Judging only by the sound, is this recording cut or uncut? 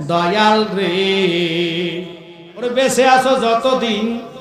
cut